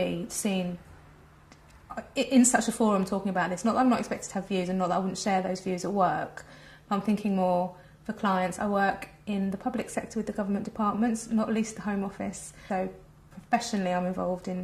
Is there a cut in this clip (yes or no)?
yes